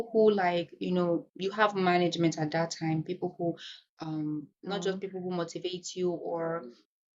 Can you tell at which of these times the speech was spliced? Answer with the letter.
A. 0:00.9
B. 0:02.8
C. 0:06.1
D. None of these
D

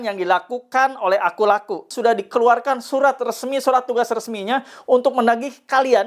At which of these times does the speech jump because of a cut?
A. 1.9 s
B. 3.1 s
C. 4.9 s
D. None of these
A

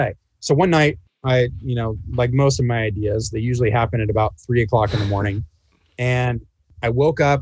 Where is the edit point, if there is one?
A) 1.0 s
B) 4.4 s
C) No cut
A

